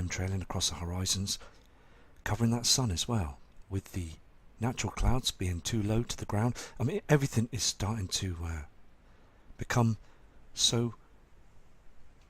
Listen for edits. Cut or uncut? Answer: cut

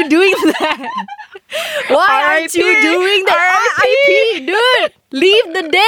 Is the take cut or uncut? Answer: uncut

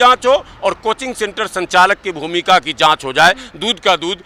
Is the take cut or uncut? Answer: uncut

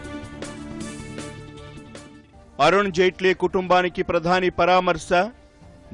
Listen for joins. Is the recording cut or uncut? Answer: uncut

